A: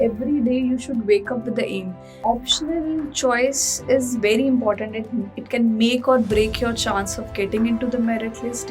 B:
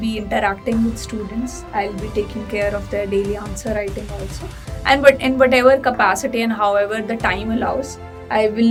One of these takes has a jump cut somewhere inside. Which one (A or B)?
A